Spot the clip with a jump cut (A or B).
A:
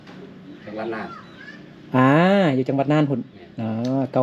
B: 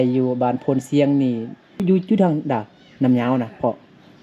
B